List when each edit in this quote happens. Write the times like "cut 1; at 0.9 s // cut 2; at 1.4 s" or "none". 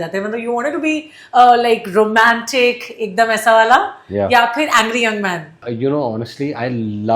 cut 1; at 5.6 s